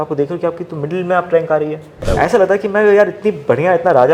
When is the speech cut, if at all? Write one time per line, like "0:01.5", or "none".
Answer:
0:02.1